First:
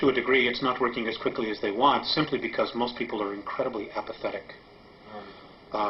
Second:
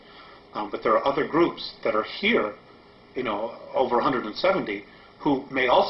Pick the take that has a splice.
second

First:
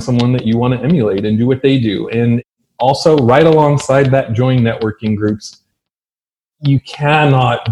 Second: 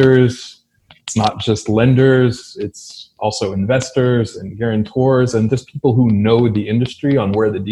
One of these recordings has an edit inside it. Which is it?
first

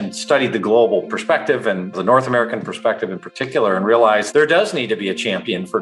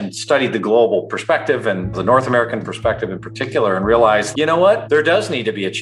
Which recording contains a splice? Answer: first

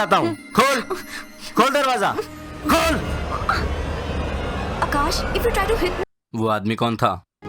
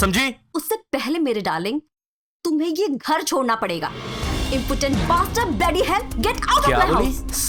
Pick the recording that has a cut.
first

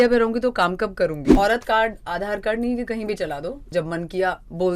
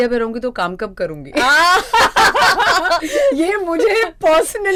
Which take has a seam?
first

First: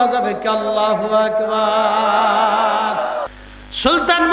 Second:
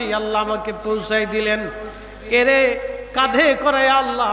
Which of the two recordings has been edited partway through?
first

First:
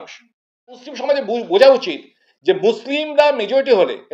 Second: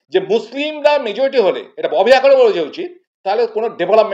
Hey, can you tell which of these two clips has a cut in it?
first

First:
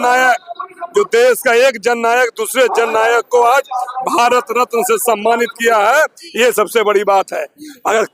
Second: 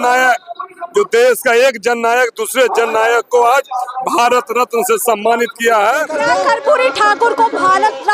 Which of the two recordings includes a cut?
second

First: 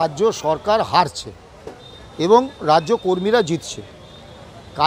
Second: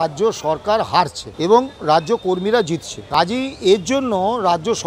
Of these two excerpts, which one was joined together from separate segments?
second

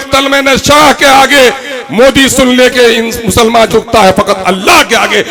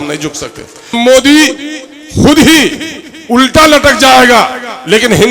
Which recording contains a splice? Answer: second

